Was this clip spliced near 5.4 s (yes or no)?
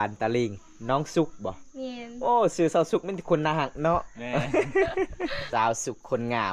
yes